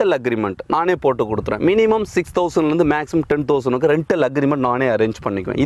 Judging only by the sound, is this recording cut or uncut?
uncut